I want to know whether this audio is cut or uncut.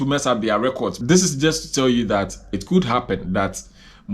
cut